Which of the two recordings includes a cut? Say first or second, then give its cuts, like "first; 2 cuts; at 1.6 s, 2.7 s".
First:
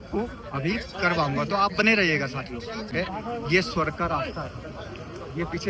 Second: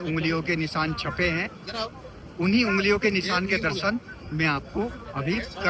first; 1 cut; at 2.9 s